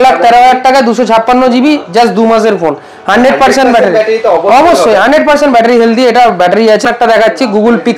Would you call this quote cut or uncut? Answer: cut